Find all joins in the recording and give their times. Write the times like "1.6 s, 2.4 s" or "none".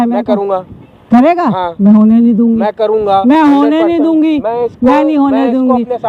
none